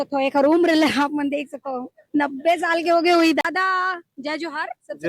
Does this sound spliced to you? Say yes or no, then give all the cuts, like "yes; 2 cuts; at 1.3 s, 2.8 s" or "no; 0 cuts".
yes; 1 cut; at 3.4 s